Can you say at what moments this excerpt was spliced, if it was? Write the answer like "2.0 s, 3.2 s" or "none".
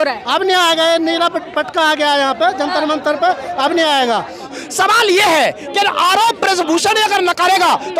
4.5 s